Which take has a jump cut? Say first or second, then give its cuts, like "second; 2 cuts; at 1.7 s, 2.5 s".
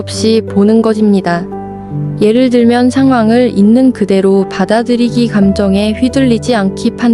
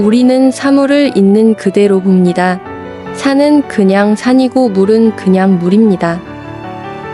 second; 1 cut; at 6.2 s